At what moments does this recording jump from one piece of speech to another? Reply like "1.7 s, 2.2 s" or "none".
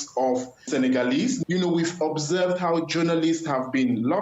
1.4 s